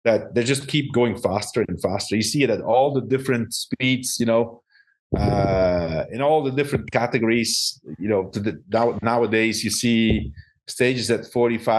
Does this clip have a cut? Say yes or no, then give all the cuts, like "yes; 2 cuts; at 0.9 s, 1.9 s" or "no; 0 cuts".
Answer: no; 0 cuts